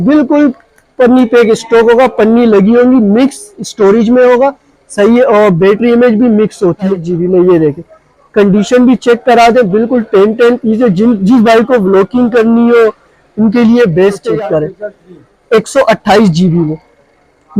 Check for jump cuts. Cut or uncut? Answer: cut